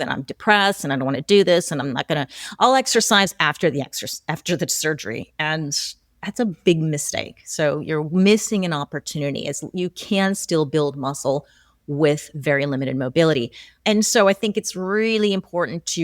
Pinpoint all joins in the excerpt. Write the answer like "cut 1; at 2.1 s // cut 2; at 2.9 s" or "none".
cut 1; at 13.7 s